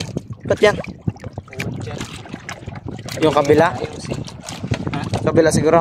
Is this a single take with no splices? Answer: yes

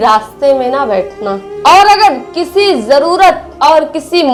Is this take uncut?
yes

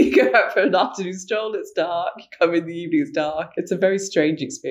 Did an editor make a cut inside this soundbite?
yes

